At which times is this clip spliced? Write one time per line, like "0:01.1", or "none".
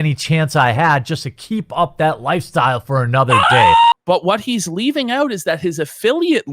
0:03.9